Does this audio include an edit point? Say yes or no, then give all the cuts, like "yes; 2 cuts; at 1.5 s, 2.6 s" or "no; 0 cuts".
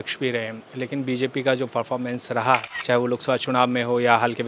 yes; 1 cut; at 2.7 s